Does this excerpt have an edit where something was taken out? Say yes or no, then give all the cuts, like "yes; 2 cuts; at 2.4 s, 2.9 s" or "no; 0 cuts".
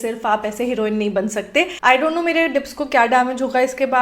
yes; 1 cut; at 1.7 s